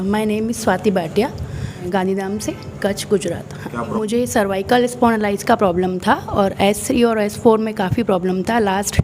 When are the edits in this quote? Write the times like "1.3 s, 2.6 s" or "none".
1.8 s, 3.9 s